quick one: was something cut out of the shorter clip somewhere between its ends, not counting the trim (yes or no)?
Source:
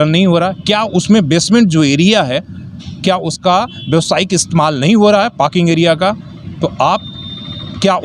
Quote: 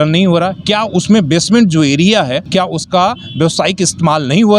yes